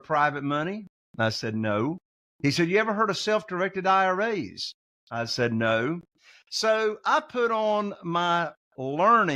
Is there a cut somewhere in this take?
no; 0 cuts

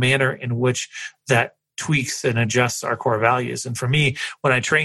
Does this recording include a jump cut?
no; 0 cuts

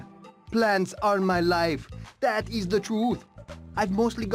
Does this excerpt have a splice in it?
no; 0 cuts

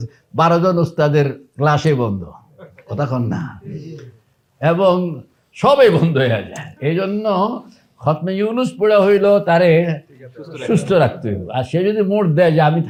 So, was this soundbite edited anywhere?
no; 0 cuts

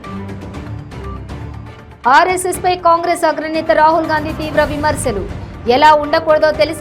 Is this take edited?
yes; 1 cut; at 1.0 s

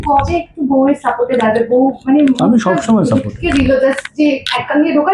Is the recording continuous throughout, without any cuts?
yes; 0 cuts

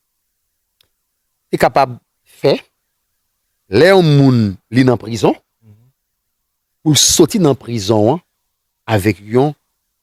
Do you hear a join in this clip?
no; 0 cuts

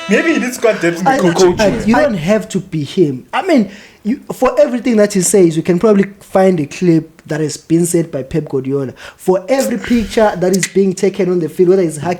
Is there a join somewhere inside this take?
yes; 1 cut; at 1.6 s

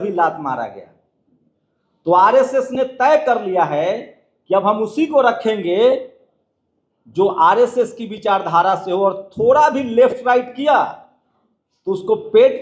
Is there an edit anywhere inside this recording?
no; 0 cuts

